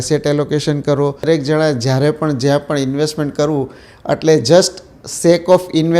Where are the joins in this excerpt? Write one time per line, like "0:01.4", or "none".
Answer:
0:01.2